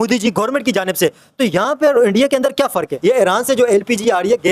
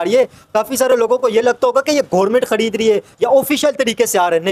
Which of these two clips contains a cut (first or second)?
first